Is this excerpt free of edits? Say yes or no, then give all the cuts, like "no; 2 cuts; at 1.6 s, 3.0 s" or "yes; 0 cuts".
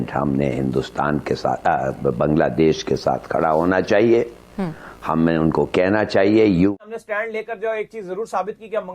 no; 1 cut; at 6.7 s